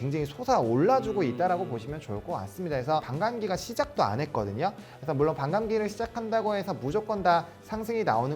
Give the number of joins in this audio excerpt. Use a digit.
1